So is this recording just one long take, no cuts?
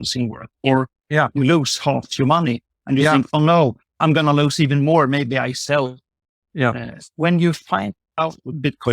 yes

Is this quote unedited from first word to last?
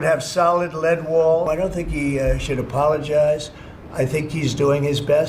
no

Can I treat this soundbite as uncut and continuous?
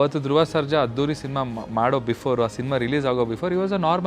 yes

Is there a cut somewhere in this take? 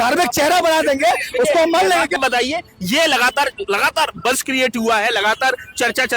yes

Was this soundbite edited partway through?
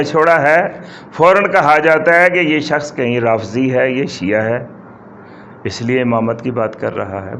no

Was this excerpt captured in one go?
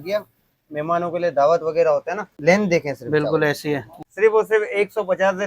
no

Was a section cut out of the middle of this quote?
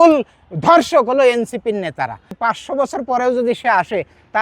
yes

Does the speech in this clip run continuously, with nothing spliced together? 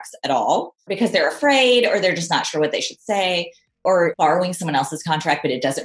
no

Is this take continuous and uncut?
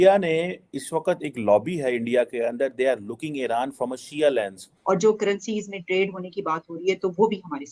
no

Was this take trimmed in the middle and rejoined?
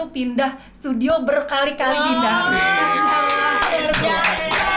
no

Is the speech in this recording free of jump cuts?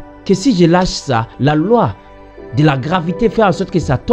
yes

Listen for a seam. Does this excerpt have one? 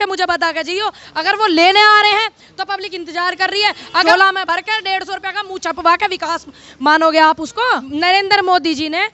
yes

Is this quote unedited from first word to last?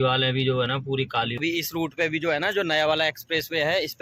no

